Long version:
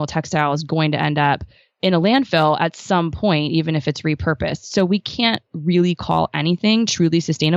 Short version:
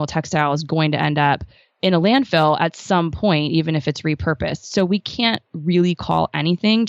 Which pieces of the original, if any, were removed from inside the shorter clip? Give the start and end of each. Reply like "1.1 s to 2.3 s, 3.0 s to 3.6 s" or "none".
none